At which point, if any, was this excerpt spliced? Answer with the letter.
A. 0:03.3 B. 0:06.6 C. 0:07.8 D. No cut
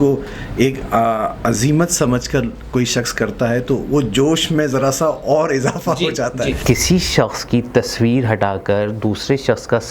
B